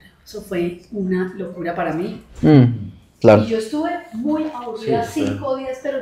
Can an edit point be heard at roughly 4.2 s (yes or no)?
no